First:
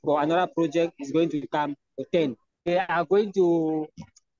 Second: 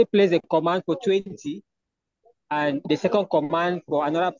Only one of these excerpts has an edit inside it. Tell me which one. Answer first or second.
first